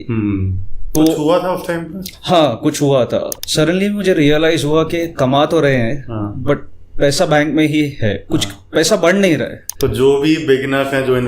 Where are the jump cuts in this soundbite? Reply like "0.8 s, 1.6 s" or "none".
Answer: 0.9 s, 3.3 s, 9.6 s